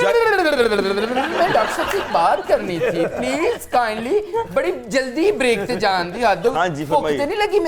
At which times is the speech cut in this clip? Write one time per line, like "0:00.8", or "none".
none

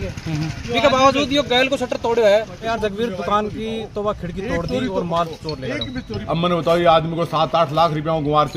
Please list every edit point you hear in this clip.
0:02.7
0:06.1

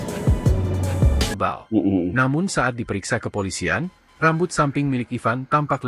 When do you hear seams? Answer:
0:01.4

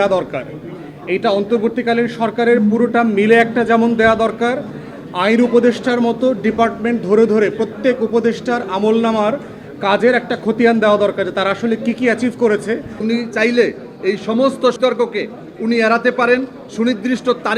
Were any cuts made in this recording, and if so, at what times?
0:13.0
0:14.8

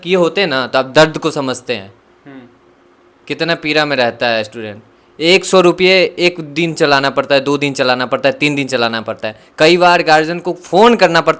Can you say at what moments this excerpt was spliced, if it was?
none

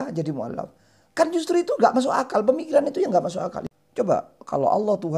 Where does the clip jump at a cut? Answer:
0:03.6

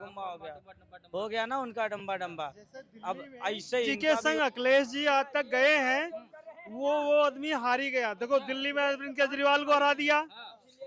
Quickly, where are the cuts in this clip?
0:03.9

